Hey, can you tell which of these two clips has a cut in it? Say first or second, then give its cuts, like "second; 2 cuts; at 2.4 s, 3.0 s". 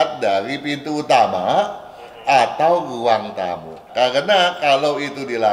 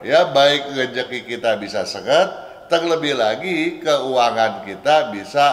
first; 1 cut; at 3.8 s